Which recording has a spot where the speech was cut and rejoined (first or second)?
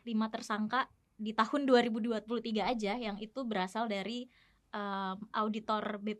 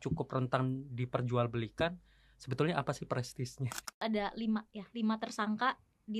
second